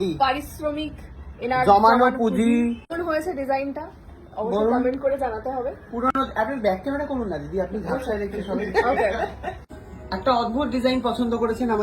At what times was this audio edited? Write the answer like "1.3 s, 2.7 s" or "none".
none